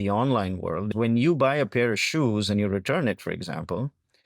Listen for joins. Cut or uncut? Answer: cut